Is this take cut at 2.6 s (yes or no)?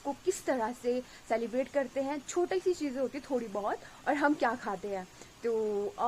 no